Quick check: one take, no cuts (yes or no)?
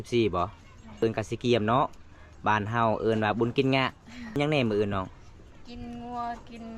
no